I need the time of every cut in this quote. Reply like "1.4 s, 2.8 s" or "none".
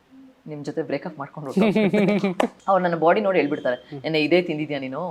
2.5 s